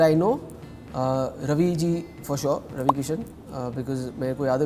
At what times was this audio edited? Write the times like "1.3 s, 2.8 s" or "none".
none